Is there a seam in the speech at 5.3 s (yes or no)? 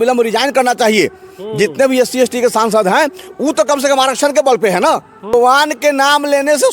yes